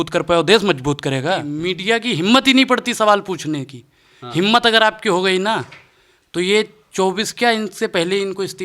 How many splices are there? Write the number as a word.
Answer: one